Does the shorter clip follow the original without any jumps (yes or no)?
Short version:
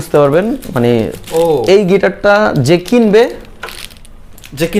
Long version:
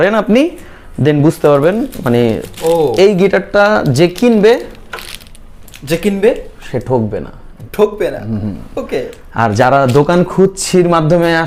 yes